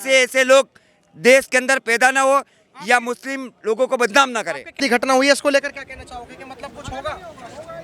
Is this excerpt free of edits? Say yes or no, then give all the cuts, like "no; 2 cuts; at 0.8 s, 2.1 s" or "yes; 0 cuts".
no; 1 cut; at 4.8 s